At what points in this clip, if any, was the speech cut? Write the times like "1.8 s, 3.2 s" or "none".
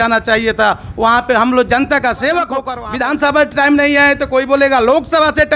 2.8 s